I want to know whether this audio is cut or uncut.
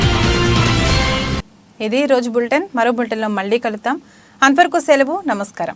uncut